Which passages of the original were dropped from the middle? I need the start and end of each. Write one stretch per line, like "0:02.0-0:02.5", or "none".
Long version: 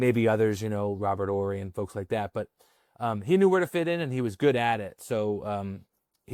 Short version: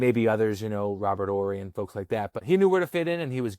0:02.4-0:03.2